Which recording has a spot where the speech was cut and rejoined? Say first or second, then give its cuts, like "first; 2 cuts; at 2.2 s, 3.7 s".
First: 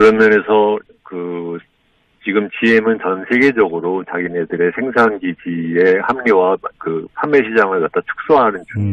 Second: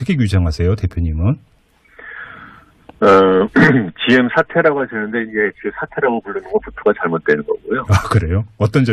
second; 1 cut; at 2.9 s